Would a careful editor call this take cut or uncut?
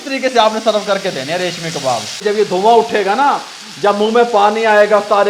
cut